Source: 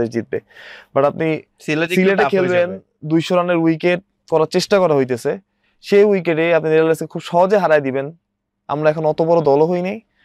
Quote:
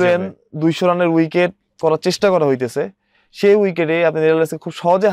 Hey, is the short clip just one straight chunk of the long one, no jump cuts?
yes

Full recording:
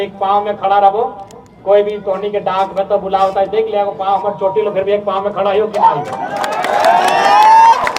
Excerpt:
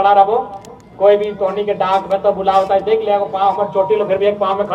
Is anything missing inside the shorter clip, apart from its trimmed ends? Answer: no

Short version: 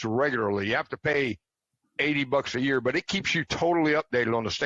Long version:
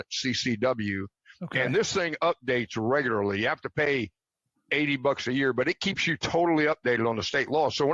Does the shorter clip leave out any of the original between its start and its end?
no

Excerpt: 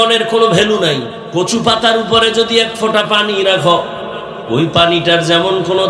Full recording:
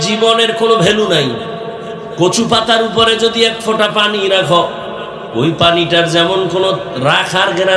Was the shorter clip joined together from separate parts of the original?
yes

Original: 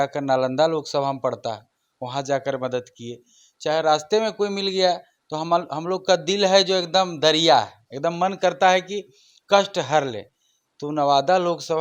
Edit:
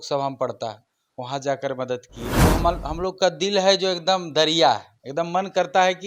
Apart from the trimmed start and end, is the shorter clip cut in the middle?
yes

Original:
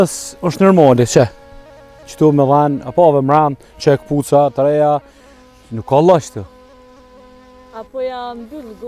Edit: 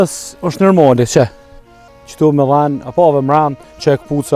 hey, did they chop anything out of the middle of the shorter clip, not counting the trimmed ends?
no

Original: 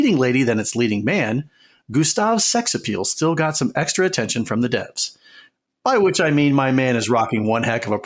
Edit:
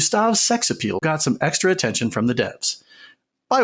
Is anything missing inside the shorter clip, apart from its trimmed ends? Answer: yes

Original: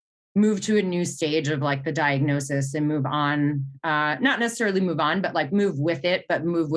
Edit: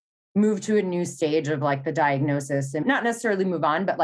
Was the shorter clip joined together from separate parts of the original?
yes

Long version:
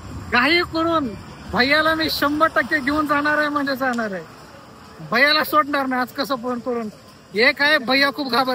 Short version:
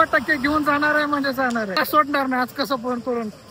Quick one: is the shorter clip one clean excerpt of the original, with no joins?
no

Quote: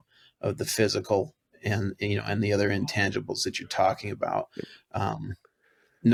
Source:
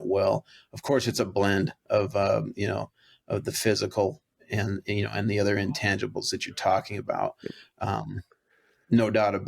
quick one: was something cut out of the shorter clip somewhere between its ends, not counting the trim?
no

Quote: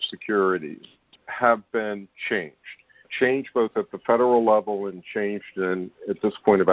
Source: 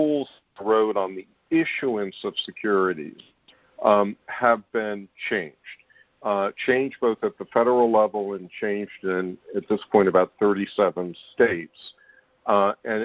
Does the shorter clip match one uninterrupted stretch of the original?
no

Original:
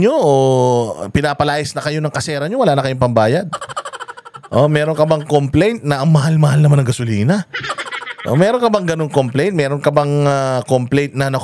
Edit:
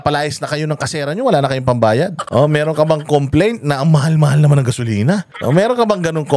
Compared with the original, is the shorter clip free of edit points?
no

